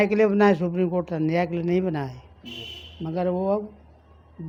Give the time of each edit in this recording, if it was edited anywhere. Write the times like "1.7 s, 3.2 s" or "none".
none